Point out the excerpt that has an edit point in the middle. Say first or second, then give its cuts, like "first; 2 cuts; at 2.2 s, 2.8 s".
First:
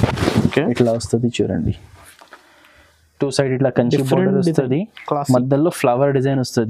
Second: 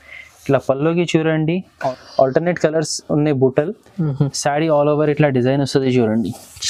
second; 1 cut; at 1.8 s